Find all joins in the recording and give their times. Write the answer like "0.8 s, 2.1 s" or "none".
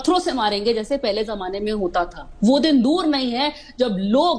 none